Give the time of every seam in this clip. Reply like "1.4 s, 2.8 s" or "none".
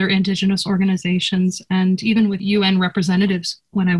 2.4 s